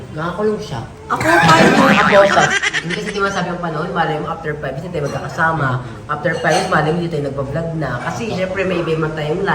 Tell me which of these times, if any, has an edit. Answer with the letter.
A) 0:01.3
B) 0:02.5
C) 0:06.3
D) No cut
B